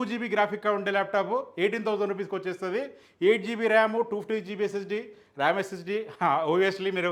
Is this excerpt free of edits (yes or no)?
yes